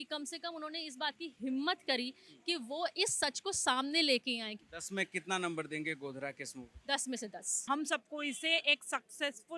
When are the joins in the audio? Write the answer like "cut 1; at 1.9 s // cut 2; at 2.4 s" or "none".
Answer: cut 1; at 4.6 s // cut 2; at 7.7 s